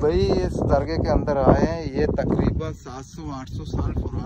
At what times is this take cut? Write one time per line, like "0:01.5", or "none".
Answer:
none